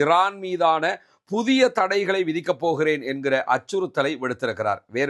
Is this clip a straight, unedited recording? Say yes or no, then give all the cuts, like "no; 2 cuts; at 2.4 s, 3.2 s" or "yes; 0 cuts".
yes; 0 cuts